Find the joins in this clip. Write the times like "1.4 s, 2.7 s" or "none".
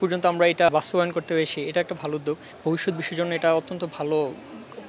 0.7 s, 2.5 s